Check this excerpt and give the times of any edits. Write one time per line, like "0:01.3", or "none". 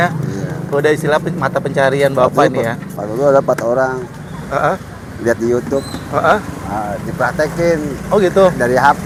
none